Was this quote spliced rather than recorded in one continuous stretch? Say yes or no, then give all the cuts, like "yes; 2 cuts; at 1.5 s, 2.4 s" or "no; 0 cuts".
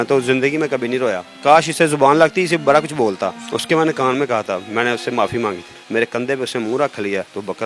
yes; 3 cuts; at 1.3 s, 3.5 s, 5.8 s